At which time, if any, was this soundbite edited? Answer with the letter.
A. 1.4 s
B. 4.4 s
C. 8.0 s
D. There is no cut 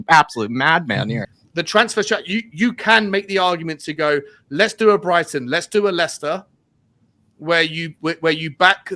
A